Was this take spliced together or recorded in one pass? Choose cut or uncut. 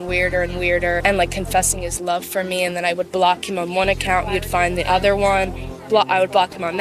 uncut